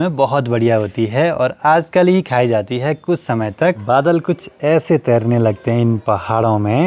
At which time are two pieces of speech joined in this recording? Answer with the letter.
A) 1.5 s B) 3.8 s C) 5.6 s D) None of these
B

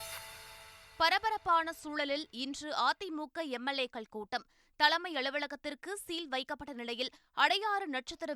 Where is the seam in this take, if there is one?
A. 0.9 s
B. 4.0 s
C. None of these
C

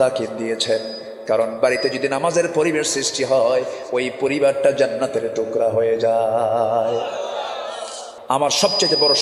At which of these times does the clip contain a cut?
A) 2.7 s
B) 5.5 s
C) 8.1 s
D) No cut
C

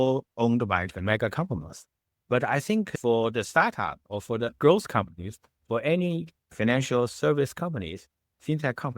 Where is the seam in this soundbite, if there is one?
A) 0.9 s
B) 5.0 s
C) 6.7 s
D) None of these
A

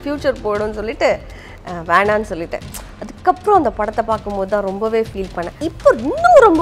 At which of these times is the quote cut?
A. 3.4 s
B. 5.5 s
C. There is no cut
B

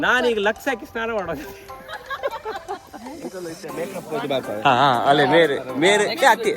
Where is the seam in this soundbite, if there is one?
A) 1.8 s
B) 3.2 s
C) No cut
B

